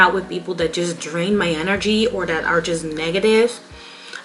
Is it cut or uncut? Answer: uncut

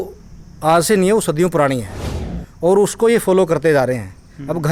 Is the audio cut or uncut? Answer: uncut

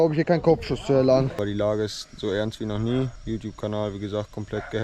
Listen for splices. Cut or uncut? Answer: cut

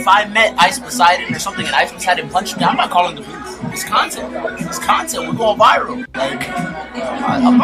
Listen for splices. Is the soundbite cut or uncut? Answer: uncut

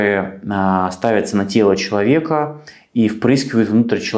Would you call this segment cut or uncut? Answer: uncut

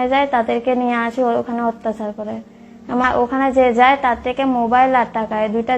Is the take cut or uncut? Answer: cut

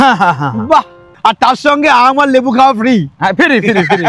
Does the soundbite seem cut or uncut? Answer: cut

